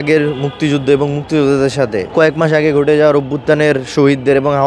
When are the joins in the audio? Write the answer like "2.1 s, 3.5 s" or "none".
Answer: 2.0 s